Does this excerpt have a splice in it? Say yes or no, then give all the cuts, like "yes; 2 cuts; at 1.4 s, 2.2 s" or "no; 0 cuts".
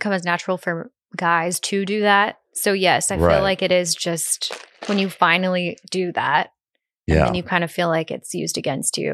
no; 0 cuts